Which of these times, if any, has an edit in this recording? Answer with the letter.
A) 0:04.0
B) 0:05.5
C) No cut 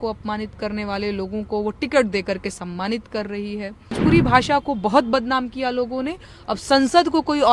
A